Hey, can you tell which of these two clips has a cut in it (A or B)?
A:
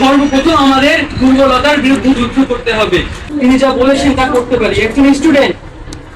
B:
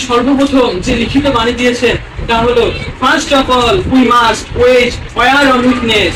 A